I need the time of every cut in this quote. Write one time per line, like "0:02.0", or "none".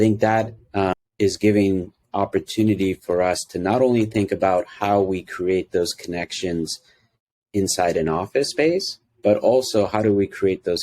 0:00.9